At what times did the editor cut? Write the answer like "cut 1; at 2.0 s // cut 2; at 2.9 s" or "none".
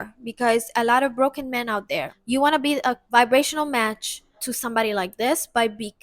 cut 1; at 2.1 s // cut 2; at 3.0 s // cut 3; at 4.5 s

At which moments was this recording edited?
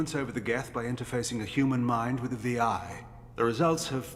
none

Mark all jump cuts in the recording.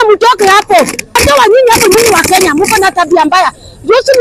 cut 1; at 1.1 s

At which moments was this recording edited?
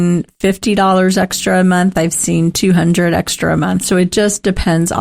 none

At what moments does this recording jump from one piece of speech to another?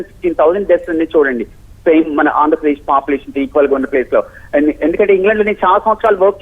cut 1; at 3.8 s

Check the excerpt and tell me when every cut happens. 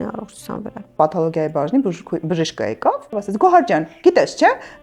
cut 1; at 0.9 s // cut 2; at 3.1 s

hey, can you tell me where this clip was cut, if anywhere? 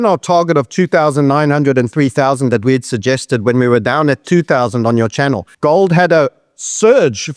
none

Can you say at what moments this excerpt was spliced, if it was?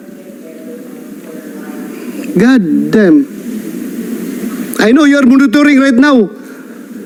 none

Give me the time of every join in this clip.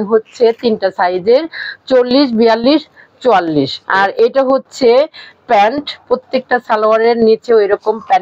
cut 1; at 3.8 s // cut 2; at 6.0 s

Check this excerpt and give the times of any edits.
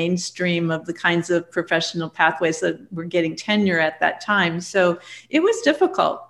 none

